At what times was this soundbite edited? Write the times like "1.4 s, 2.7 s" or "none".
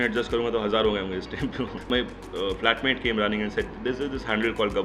1.9 s